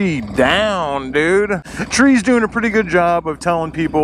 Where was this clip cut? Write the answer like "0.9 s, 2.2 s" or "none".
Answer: 1.6 s